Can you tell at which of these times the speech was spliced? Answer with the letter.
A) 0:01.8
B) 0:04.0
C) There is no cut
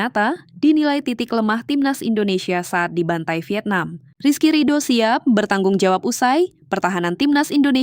B